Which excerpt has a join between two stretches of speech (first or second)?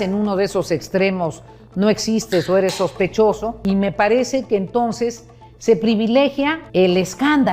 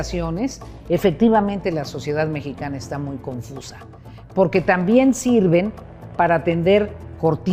first